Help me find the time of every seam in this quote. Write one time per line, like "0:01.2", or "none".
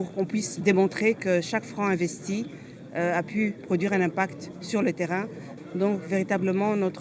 0:05.4